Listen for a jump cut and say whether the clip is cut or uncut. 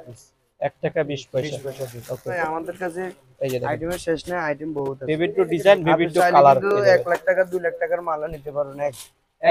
cut